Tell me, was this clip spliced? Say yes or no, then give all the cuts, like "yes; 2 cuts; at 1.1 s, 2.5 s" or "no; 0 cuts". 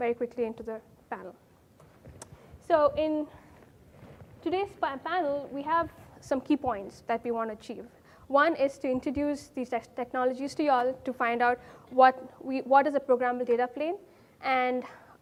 no; 0 cuts